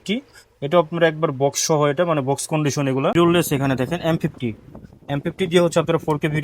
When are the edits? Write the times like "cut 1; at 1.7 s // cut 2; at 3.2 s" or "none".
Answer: cut 1; at 3.1 s